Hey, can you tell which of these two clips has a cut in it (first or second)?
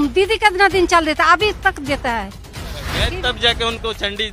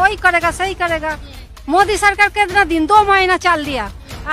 first